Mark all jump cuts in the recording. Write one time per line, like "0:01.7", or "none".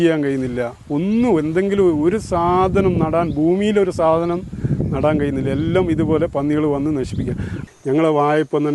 0:07.6